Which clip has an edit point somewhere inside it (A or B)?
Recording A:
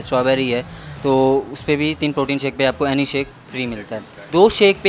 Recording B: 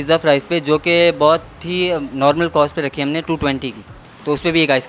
A